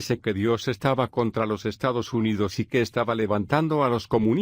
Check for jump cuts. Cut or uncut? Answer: cut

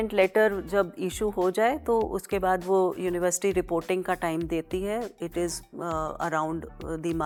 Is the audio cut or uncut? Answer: uncut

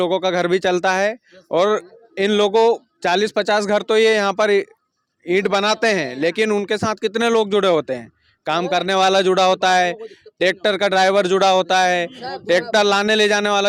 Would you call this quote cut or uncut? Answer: uncut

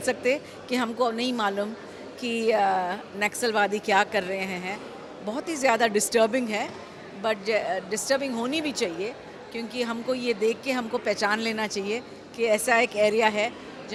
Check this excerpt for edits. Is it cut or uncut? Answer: uncut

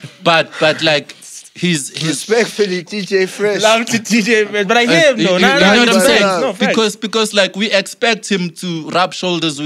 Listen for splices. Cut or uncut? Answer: uncut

